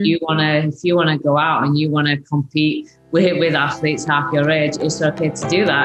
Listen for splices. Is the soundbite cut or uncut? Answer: uncut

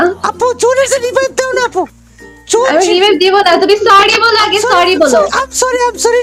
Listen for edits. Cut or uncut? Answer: cut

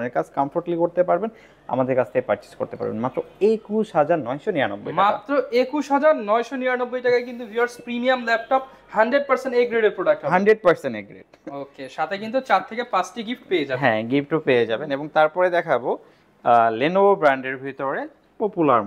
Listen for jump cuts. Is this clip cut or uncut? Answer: uncut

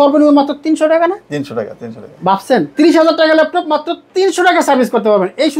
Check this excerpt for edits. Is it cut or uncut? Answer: uncut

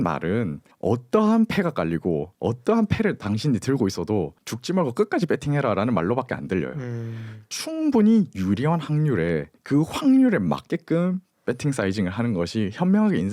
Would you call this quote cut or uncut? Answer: uncut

